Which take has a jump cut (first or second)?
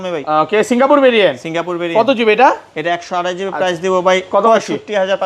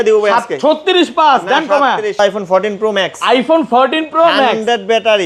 second